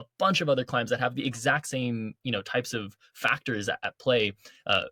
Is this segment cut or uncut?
uncut